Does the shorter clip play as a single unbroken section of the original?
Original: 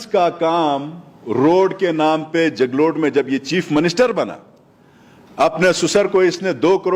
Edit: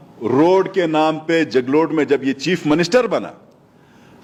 yes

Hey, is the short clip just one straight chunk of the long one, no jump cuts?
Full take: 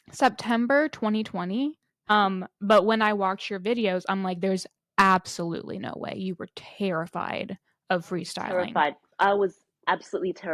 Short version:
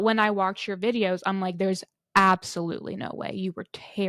yes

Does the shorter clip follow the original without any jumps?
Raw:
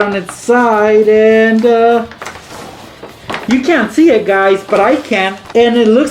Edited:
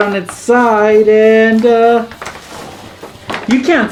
yes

